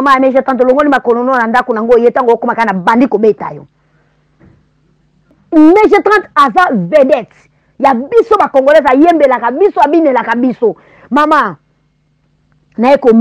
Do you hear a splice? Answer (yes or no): yes